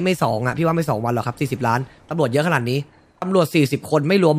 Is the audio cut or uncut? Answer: cut